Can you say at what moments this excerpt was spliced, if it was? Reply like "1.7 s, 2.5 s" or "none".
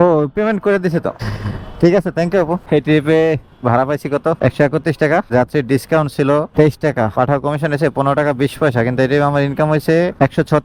none